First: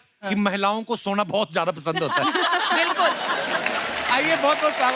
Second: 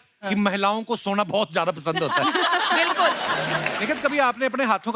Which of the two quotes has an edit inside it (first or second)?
second